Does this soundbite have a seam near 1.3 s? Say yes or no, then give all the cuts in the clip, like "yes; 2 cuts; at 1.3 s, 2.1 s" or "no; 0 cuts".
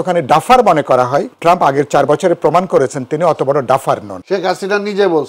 yes; 2 cuts; at 1.3 s, 4.1 s